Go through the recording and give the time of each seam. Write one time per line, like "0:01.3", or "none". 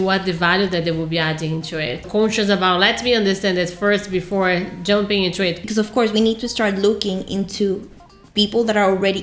0:02.1
0:05.6